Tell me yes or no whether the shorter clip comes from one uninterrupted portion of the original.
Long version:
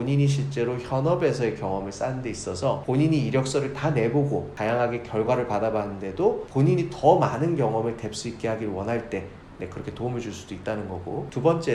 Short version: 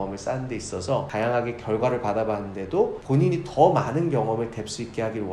no